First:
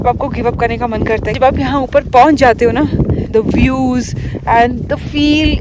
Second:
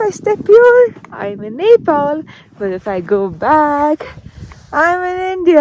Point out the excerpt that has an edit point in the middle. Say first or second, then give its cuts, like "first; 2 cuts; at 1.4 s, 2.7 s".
first; 2 cuts; at 1.3 s, 3.3 s